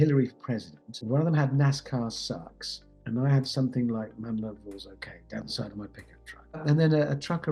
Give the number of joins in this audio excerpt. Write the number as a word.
three